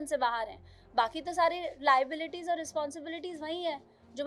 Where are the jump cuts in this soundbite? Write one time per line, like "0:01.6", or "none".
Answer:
none